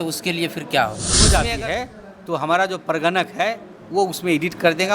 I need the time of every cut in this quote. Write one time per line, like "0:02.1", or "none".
0:01.3